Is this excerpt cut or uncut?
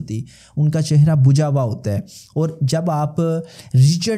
uncut